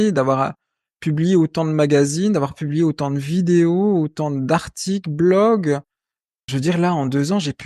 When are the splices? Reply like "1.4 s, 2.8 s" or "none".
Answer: 6.4 s